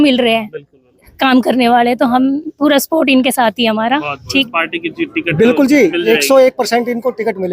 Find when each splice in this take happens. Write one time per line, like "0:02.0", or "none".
0:04.5